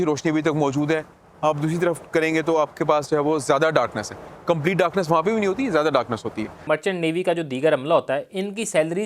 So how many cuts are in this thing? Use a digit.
1